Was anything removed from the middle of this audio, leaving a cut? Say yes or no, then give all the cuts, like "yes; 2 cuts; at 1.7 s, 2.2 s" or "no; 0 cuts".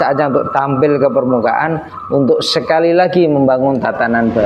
no; 0 cuts